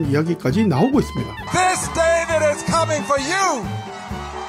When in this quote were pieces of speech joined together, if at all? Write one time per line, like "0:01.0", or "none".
none